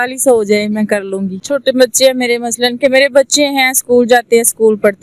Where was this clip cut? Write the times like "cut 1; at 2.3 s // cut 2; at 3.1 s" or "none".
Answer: cut 1; at 1.3 s